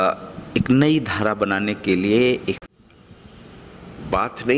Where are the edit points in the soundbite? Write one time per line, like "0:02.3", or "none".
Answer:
0:02.6